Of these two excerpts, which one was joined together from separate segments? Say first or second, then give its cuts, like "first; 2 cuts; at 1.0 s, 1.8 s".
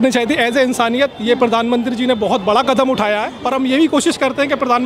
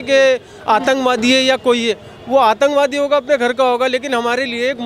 first; 1 cut; at 3.3 s